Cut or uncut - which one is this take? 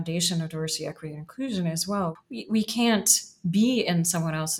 cut